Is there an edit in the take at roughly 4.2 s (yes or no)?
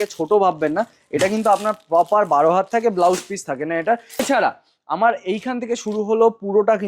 yes